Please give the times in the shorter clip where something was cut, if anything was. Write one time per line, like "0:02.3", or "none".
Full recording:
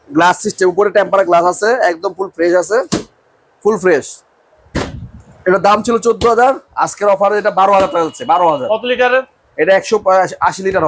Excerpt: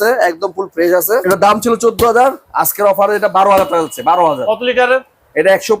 0:01.2